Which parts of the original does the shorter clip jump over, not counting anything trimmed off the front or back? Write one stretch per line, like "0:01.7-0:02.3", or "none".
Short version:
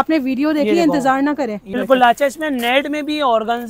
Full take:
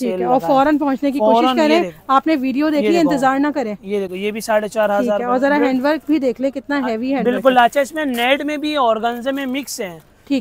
0:03.9-0:07.3